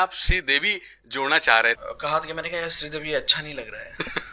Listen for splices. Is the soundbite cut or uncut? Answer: cut